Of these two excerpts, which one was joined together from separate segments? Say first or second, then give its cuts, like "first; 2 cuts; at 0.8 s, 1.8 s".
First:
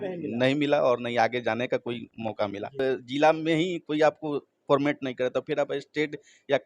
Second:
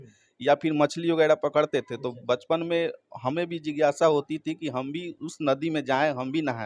first; 1 cut; at 2.7 s